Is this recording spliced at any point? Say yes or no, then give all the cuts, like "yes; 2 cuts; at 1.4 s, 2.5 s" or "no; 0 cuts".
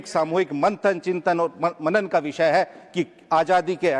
no; 0 cuts